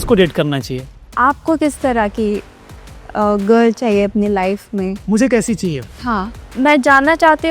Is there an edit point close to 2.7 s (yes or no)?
no